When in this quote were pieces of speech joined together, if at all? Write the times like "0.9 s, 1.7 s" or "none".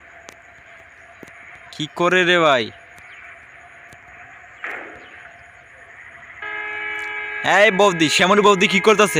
none

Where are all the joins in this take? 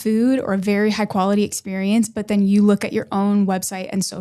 none

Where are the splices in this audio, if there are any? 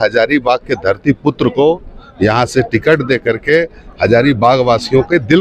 none

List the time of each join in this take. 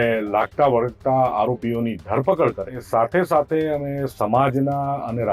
2.8 s

